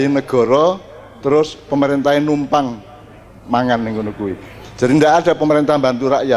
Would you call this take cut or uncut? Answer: uncut